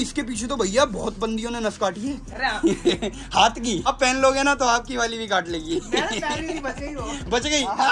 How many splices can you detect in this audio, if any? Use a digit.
1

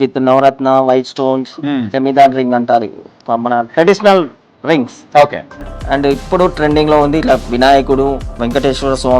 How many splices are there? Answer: 1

